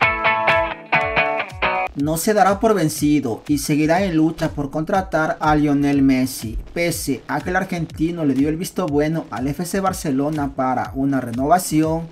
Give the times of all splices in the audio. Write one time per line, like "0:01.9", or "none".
none